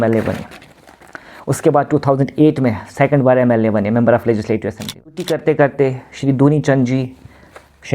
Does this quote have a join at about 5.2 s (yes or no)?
yes